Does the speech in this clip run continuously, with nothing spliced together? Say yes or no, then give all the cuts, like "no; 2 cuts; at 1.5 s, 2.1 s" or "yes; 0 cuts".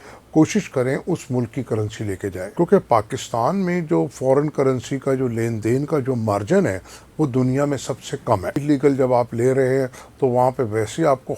no; 2 cuts; at 2.4 s, 8.6 s